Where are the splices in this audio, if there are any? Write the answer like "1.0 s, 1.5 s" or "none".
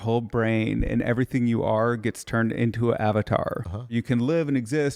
3.9 s